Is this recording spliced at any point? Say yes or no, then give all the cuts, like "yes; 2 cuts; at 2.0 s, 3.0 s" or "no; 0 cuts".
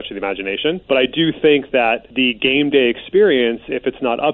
yes; 2 cuts; at 0.8 s, 2.1 s